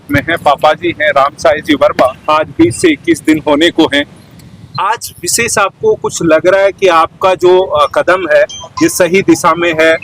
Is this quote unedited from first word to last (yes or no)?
no